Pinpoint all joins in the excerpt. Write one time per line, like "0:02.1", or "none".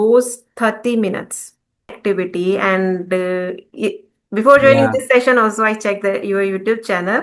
0:02.0